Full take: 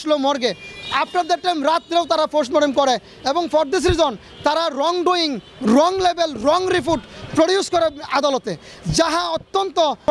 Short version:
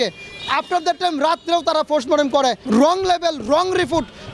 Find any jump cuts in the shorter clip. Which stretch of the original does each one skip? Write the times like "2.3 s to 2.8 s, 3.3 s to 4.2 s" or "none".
3.0 s to 5.6 s